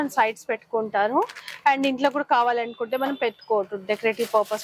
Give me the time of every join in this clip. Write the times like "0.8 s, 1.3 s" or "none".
none